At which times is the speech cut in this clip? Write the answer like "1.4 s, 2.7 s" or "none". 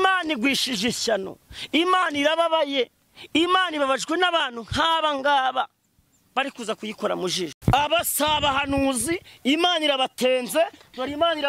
7.6 s

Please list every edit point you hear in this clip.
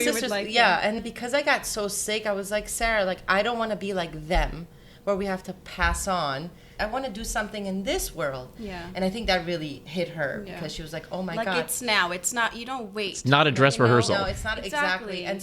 6.7 s

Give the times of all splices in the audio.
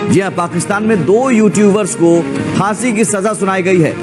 none

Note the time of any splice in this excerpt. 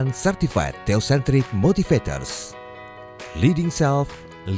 none

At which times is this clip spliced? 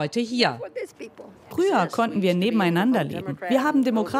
1.5 s

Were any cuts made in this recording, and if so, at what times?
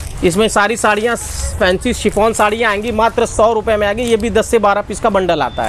none

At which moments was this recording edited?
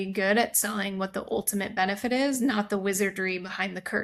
none

